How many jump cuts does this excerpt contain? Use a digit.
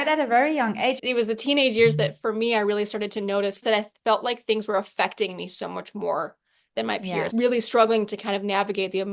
3